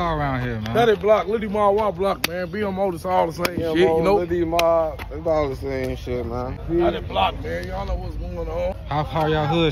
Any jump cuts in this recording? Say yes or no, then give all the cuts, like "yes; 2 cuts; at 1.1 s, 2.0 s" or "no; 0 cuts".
no; 0 cuts